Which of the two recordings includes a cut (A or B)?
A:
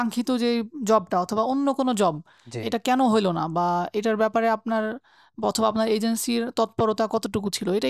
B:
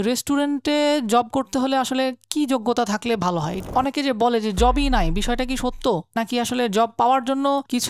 B